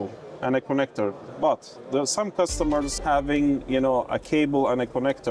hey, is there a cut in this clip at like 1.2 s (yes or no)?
yes